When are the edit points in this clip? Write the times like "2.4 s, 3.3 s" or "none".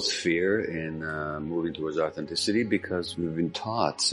3.1 s